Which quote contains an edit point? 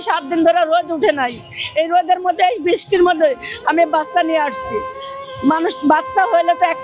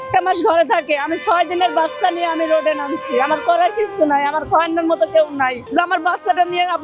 second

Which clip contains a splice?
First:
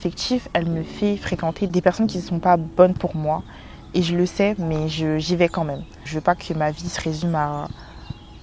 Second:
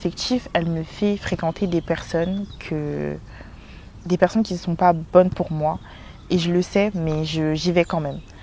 first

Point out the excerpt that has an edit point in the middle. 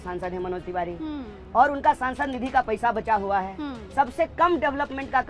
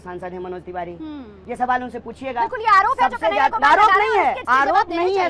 second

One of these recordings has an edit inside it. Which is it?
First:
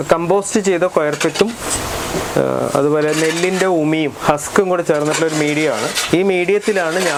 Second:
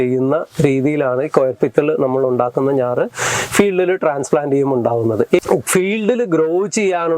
second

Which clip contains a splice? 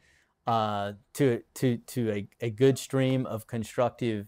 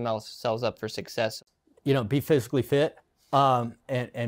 second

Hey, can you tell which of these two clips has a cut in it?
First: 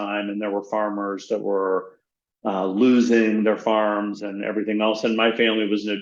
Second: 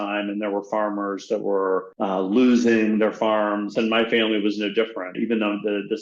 second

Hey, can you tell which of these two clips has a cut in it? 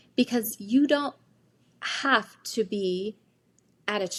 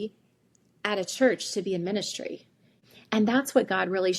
second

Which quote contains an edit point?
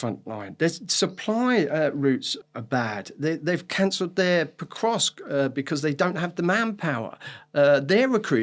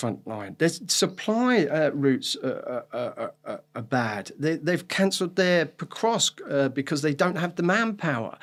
first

